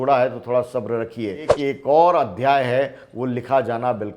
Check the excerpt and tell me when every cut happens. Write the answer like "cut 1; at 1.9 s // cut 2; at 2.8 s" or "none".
cut 1; at 1.5 s